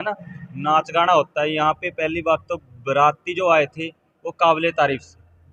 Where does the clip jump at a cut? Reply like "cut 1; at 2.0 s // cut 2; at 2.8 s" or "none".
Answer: none